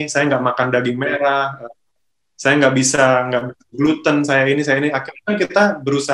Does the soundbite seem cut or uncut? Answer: uncut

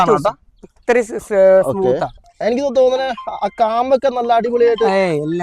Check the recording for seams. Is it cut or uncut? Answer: cut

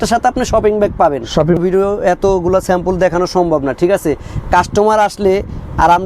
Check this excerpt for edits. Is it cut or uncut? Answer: cut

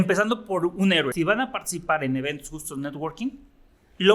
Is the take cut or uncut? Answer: cut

